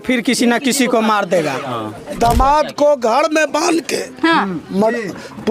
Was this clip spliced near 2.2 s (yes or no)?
yes